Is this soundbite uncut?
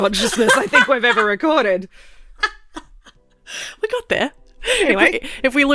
no; 1 cut; at 4.5 s

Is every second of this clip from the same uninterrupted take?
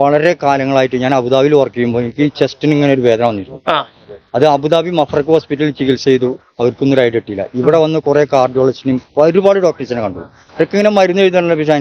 yes; 0 cuts

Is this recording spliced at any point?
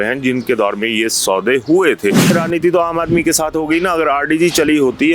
yes; 1 cut; at 2.3 s

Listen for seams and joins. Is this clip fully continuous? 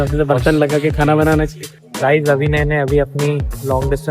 no; 1 cut; at 1.8 s

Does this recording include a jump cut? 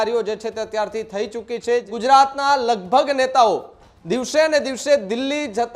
yes; 1 cut; at 1.9 s

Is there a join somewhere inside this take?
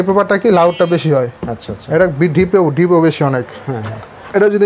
no; 0 cuts

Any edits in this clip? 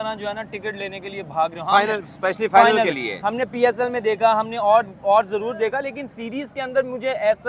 no; 0 cuts

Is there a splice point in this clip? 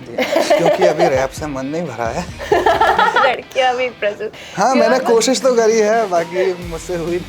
yes; 2 cuts; at 1.1 s, 3.2 s

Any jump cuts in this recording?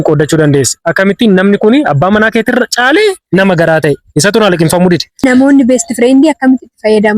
yes; 1 cut; at 5.2 s

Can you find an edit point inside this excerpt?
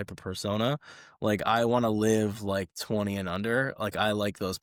no; 0 cuts

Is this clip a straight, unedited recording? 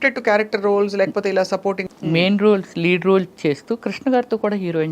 no; 1 cut; at 1.8 s

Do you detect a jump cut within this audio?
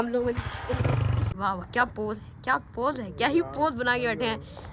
yes; 1 cut; at 1.2 s

